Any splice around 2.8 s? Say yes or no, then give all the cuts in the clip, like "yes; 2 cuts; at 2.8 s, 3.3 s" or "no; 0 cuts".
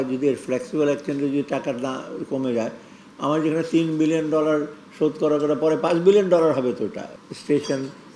no; 1 cut; at 7.1 s